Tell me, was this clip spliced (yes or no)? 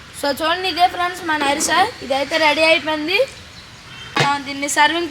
yes